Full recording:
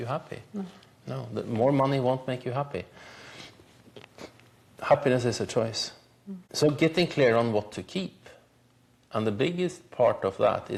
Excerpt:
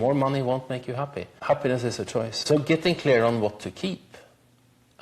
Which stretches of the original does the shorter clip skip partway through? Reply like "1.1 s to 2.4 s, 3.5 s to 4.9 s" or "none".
2.8 s to 4.7 s, 5.8 s to 6.5 s